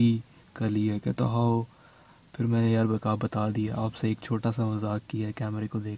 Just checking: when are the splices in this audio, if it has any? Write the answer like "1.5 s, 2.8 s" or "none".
none